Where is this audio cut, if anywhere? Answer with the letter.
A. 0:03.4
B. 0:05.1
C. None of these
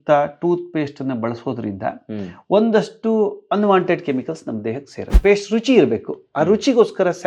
B